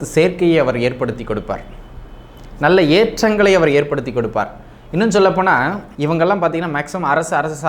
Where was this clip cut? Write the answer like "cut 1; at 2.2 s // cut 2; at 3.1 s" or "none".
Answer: cut 1; at 5.8 s

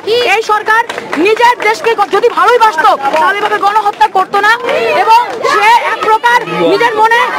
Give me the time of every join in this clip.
none

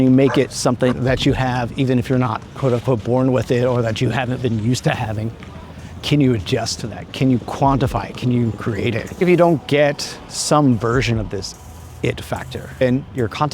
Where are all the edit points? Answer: cut 1; at 0.8 s // cut 2; at 9.1 s

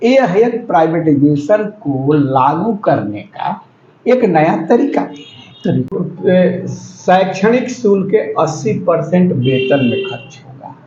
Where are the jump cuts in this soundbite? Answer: cut 1; at 6.0 s

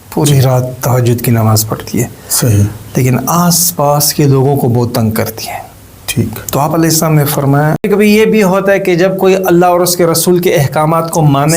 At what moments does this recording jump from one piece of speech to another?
cut 1; at 7.9 s

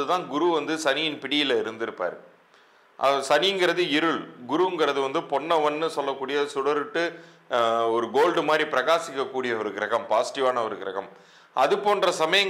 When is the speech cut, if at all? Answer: none

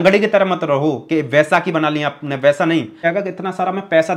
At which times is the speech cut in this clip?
cut 1; at 3.0 s

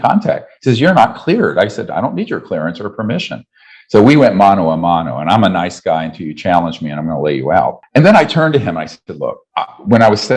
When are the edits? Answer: cut 1; at 7.8 s // cut 2; at 9.4 s

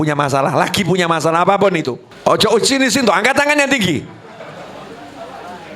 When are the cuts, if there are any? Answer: cut 1; at 2.0 s

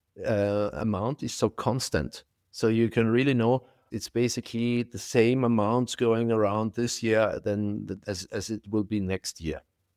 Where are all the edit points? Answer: cut 1; at 3.8 s // cut 2; at 8.0 s

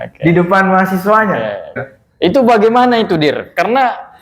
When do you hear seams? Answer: cut 1; at 2.0 s

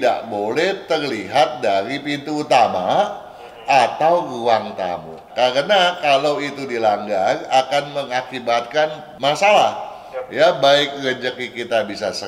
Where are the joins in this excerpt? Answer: cut 1; at 5.2 s // cut 2; at 9.1 s

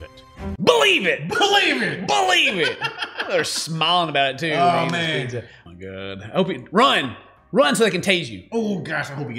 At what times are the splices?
none

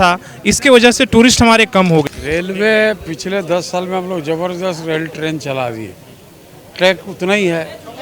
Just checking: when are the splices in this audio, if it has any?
cut 1; at 2.0 s

